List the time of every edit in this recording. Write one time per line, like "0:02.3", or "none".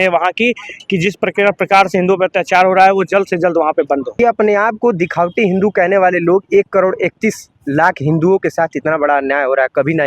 0:04.2